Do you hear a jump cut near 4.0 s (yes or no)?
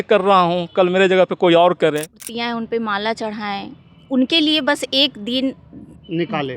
no